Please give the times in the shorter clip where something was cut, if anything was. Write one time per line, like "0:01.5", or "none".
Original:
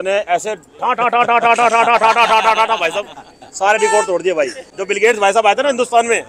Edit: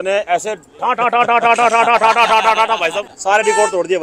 0:03.1